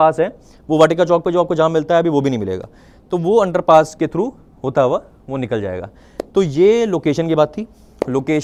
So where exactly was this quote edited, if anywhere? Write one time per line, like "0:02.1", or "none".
none